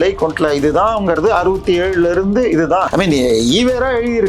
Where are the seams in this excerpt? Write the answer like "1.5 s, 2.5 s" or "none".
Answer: 2.9 s